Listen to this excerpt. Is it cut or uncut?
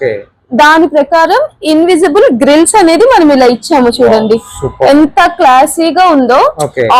uncut